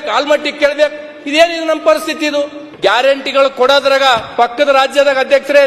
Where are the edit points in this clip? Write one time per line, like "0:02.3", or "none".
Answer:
0:02.6